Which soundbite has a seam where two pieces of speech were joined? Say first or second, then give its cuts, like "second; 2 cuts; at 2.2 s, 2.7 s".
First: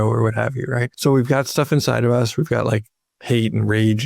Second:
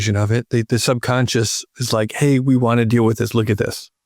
first; 1 cut; at 0.9 s